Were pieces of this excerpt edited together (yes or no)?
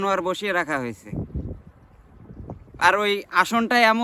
no